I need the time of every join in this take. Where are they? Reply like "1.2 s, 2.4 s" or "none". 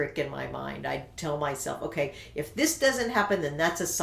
none